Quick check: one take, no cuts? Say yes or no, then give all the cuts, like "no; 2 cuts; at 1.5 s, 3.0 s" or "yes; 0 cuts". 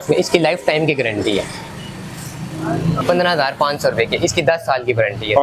no; 1 cut; at 3.0 s